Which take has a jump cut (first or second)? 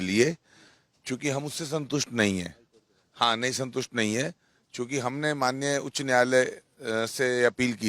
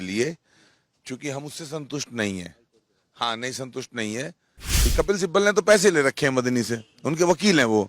second